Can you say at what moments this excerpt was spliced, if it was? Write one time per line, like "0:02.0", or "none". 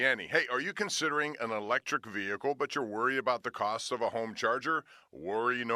none

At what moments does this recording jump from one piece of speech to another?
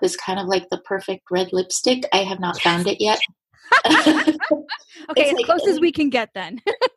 none

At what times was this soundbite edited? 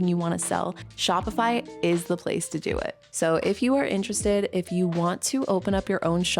0:03.0

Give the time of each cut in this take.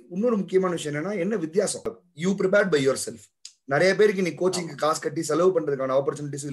0:02.0

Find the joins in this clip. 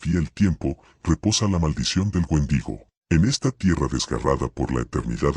0:02.9

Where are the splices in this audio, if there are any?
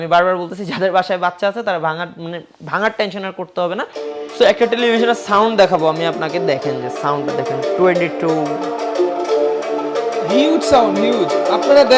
0:03.9

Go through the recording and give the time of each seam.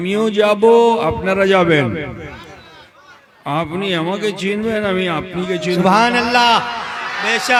none

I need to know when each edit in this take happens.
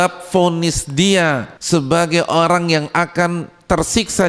0:01.5

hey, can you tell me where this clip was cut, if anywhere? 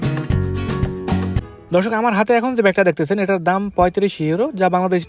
0:01.5

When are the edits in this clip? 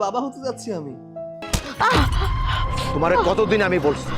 0:01.4

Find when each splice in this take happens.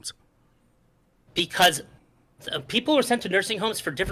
none

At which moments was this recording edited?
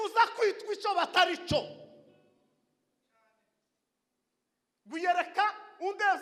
none

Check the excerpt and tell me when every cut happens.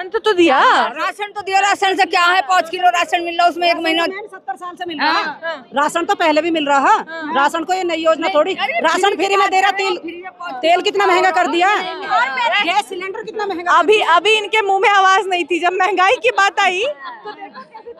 0:12.1

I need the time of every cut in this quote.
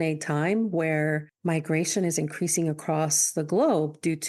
0:01.3

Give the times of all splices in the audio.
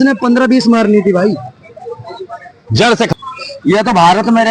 0:03.1

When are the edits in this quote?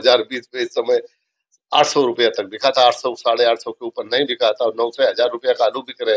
none

